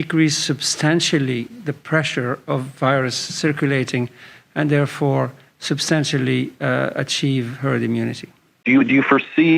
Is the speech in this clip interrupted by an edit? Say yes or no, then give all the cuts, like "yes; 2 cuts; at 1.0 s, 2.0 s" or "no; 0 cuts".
yes; 1 cut; at 8.6 s